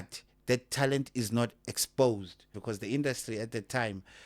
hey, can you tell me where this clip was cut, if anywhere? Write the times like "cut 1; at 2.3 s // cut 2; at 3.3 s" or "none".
cut 1; at 2.5 s